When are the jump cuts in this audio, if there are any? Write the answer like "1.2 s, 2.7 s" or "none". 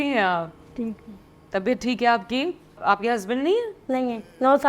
2.8 s